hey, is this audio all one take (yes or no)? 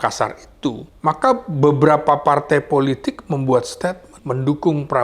no